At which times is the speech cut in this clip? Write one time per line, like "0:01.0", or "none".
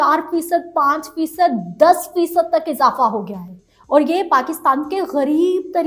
none

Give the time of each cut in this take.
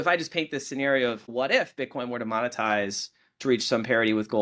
0:01.3

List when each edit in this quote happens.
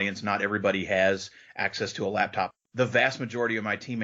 0:02.5

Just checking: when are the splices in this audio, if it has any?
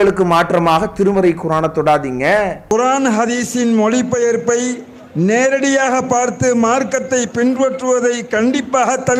none

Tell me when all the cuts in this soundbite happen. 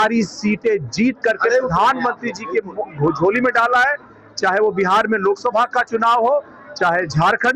none

